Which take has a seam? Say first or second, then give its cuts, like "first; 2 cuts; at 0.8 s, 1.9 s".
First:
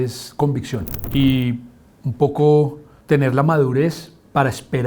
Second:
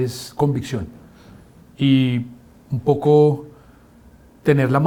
first; 2 cuts; at 1.0 s, 2.9 s